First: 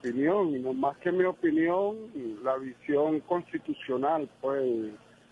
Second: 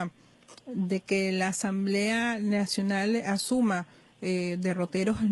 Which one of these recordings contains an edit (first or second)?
first